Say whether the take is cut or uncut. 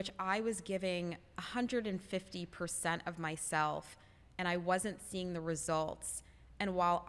uncut